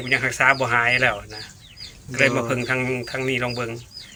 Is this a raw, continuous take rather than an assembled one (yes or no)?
yes